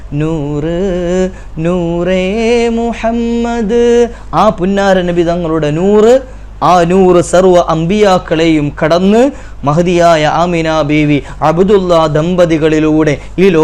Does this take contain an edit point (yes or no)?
no